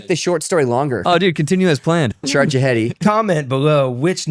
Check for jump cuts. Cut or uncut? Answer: cut